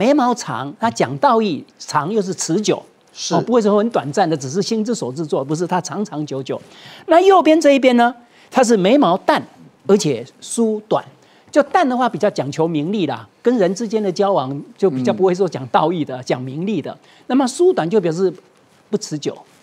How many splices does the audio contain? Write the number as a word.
zero